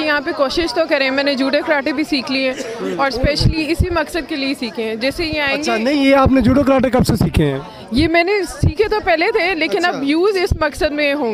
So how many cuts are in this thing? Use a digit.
0